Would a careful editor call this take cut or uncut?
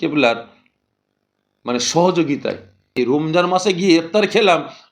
cut